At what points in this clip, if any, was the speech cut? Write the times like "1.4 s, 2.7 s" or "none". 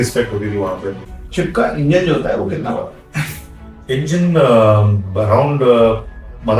1.1 s